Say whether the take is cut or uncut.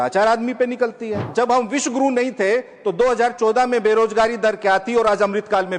cut